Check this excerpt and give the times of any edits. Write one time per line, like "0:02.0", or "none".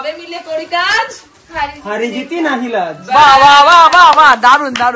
none